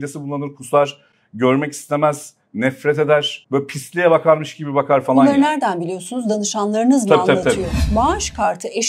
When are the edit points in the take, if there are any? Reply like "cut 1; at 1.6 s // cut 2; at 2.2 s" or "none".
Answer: cut 1; at 3.4 s // cut 2; at 7.8 s

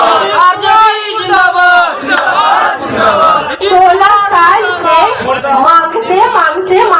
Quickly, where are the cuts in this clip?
none

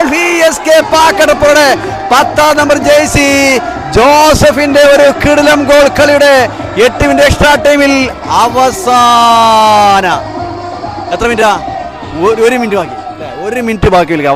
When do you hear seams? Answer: none

